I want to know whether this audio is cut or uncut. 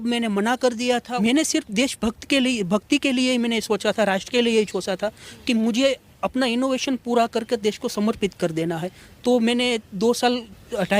cut